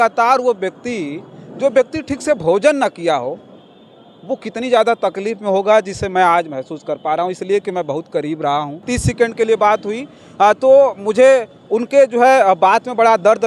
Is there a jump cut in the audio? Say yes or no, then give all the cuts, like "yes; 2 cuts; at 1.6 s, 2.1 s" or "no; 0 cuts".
yes; 1 cut; at 8.8 s